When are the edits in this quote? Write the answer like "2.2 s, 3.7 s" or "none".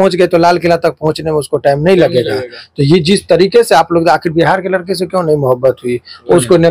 none